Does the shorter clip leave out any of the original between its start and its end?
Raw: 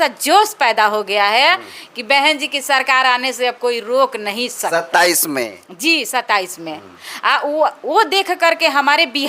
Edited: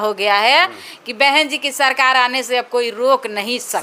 no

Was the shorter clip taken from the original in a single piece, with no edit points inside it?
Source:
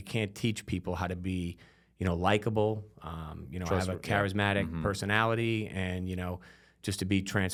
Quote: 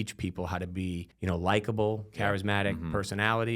no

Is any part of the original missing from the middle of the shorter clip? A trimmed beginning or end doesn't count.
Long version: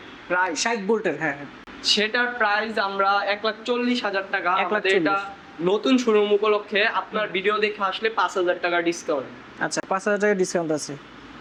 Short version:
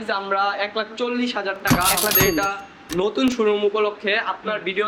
no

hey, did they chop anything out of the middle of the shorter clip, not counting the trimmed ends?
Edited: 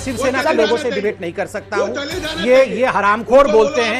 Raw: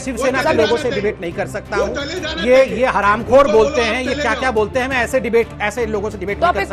no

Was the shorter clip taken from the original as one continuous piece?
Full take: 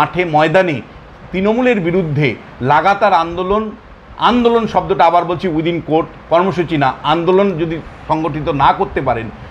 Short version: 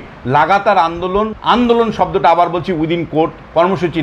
no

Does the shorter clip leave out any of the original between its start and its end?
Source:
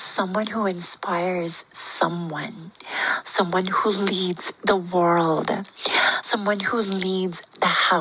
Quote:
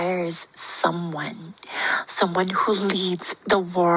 no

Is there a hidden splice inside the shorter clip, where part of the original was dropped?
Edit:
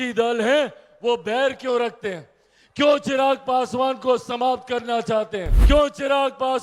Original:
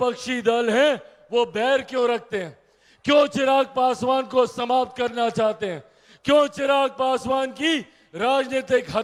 yes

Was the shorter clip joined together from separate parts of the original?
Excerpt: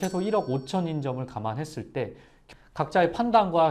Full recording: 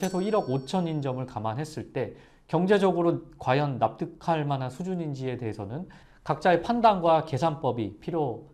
yes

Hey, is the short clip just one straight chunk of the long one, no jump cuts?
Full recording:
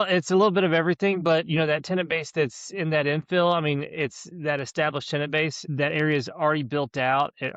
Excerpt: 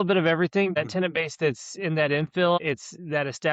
no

